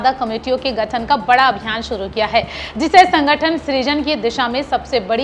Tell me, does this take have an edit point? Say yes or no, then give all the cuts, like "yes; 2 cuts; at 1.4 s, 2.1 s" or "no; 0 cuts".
no; 0 cuts